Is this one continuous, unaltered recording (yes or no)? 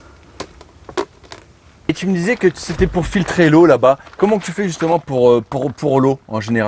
yes